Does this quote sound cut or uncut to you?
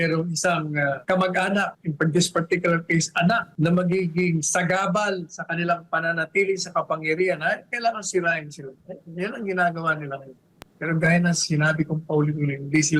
cut